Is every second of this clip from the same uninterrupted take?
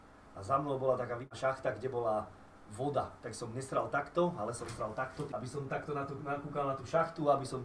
no; 2 cuts; at 1.3 s, 5.3 s

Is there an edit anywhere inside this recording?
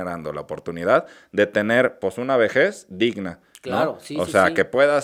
no; 0 cuts

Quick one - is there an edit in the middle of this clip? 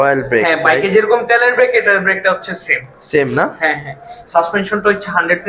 no; 0 cuts

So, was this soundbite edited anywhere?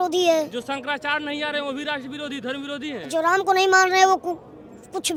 no; 0 cuts

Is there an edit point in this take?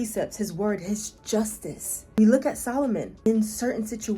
yes; 2 cuts; at 2.2 s, 3.3 s

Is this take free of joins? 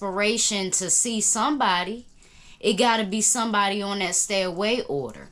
yes; 0 cuts

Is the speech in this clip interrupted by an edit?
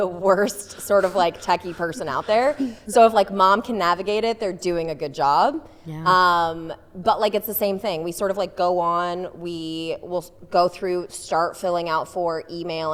no; 0 cuts

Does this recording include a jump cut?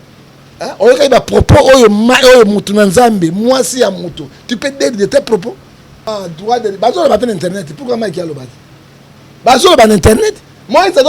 yes; 1 cut; at 6.0 s

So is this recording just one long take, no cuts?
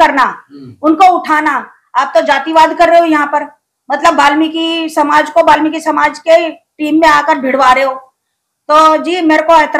yes; 0 cuts

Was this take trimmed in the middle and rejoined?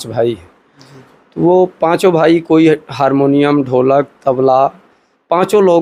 no; 0 cuts

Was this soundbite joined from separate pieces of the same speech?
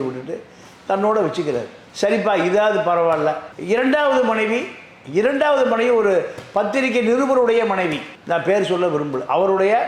no; 0 cuts

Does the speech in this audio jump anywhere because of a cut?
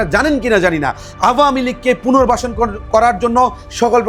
no; 0 cuts

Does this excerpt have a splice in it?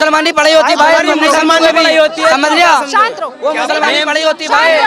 no; 0 cuts

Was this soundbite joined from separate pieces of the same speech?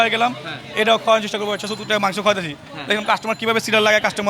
no; 0 cuts

